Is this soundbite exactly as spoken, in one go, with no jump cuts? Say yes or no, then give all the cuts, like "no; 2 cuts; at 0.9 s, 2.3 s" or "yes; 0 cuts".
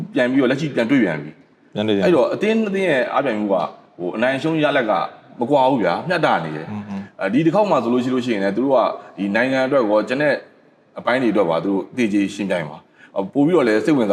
yes; 0 cuts